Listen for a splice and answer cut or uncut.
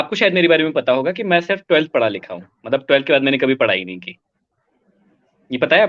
uncut